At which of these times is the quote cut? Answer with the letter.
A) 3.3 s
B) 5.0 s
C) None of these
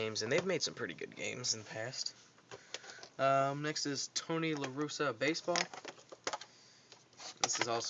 A